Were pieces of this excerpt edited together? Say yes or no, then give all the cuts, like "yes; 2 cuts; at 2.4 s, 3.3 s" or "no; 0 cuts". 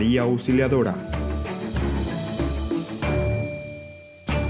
yes; 1 cut; at 1.0 s